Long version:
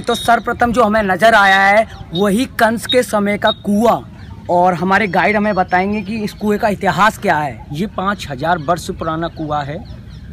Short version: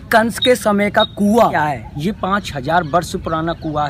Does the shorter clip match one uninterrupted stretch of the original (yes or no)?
no